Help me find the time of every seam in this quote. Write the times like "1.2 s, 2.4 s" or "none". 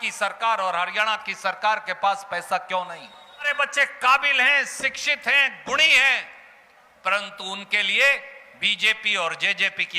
3.5 s